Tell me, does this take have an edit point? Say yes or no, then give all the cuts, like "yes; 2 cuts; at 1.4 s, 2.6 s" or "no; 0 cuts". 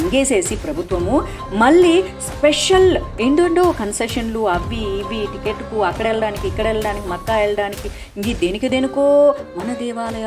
no; 0 cuts